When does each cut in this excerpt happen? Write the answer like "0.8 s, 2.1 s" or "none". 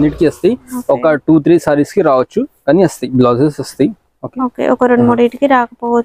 none